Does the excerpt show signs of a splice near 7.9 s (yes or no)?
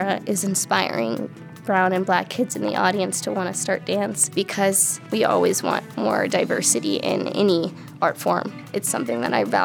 no